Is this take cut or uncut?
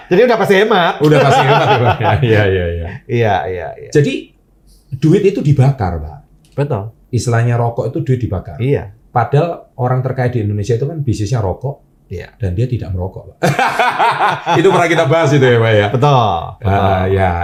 uncut